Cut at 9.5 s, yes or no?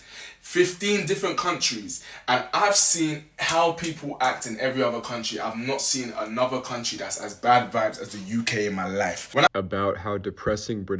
yes